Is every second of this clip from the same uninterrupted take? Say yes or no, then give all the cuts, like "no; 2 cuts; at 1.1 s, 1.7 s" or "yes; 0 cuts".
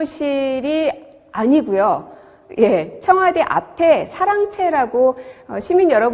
yes; 0 cuts